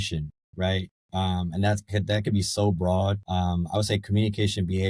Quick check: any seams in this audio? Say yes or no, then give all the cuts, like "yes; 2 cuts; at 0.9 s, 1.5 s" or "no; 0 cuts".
yes; 1 cut; at 3.2 s